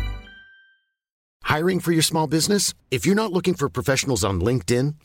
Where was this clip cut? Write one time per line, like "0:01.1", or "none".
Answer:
0:01.1